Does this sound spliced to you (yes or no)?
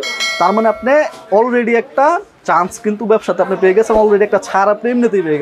no